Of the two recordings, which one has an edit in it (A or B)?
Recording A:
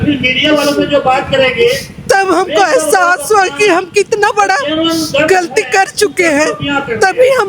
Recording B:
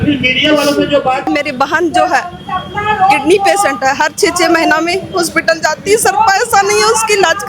B